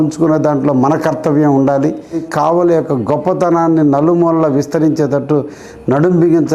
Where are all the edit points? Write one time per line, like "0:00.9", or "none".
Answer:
0:02.3